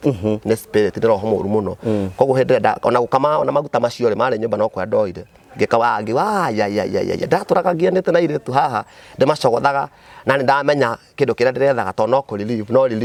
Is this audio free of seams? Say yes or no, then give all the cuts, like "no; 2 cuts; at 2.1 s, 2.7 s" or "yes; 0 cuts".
yes; 0 cuts